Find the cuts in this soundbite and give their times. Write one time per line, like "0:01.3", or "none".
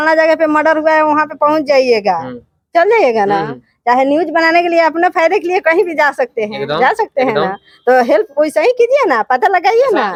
none